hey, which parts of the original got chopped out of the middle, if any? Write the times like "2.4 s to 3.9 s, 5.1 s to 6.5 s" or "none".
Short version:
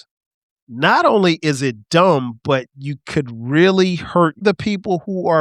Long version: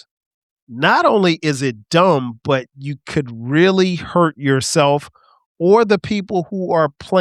4.4 s to 5.9 s